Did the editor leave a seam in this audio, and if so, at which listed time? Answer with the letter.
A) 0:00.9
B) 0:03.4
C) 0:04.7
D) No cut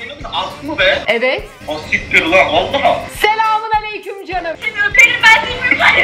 C